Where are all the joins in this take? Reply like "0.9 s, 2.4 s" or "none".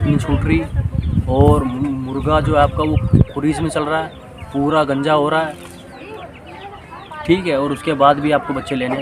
none

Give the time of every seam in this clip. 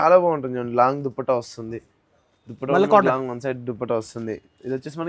none

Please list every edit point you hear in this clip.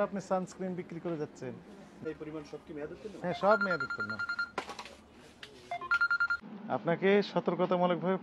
2.0 s, 6.4 s

